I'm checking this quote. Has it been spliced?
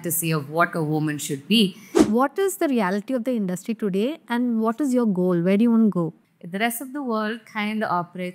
yes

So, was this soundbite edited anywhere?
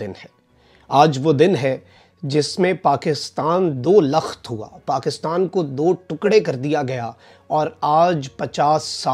no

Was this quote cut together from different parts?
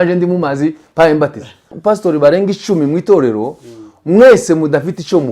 yes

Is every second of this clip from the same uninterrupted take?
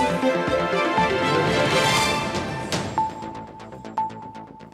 yes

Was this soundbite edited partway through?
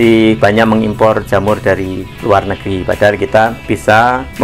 yes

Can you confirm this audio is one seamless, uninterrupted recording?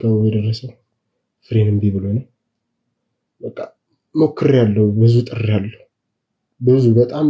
yes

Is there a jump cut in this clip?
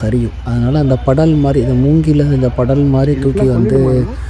no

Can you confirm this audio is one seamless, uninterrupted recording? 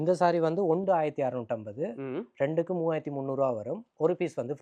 yes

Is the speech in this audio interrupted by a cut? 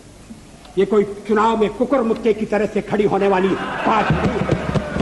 no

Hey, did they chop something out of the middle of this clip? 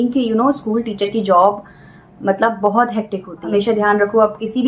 yes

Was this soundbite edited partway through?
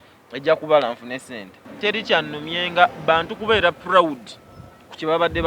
yes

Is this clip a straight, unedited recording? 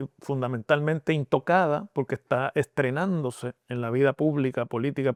yes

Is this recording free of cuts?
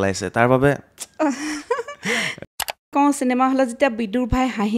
no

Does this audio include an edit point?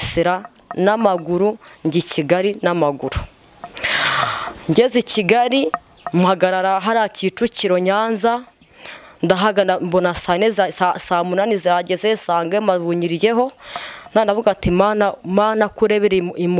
no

